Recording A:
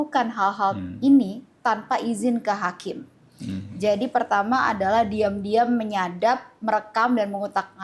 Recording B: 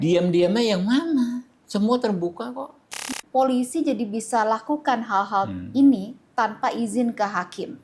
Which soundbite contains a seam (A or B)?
B